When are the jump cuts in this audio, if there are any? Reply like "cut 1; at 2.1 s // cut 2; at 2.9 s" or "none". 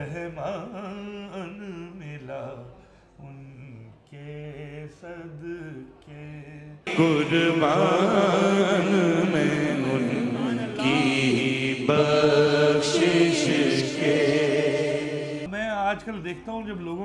cut 1; at 15.5 s